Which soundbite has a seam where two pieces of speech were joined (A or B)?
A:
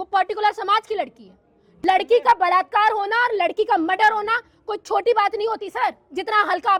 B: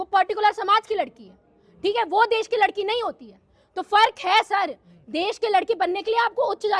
A